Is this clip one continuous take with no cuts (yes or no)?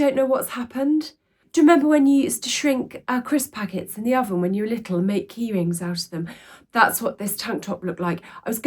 no